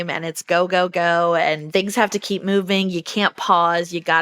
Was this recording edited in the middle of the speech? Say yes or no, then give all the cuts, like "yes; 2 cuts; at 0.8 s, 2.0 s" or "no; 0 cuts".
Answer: yes; 1 cut; at 1.6 s